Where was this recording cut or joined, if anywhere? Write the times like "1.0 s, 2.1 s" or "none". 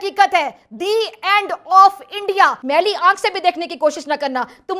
2.6 s